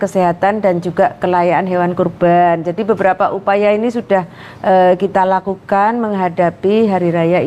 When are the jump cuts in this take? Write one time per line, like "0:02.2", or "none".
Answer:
none